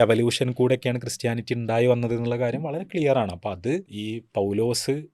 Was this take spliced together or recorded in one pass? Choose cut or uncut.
cut